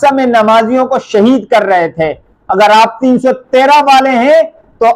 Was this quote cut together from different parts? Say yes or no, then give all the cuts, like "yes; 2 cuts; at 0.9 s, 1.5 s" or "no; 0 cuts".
no; 0 cuts